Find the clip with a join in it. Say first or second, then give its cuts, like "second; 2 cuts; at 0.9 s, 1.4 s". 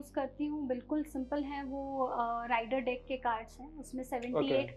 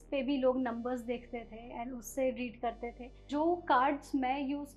second; 1 cut; at 3.3 s